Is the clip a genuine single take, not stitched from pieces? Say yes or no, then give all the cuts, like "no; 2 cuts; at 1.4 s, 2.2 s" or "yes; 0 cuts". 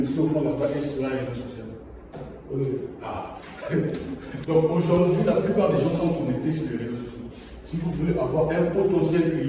no; 1 cut; at 4.3 s